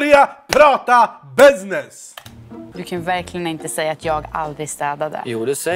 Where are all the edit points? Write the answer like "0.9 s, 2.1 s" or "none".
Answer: 2.7 s